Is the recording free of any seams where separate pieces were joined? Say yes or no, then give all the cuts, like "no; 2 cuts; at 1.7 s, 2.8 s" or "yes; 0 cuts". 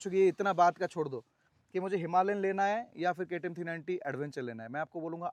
yes; 0 cuts